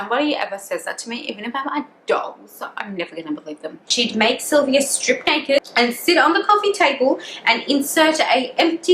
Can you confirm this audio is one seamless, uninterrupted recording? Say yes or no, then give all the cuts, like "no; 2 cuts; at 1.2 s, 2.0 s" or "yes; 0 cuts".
no; 2 cuts; at 3.9 s, 5.7 s